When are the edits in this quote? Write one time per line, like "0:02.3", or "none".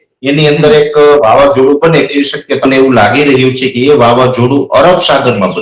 0:02.6